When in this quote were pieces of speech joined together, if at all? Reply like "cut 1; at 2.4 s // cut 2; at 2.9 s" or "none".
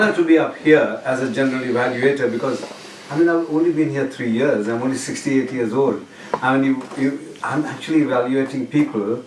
cut 1; at 7.8 s